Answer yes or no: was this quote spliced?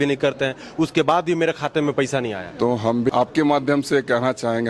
yes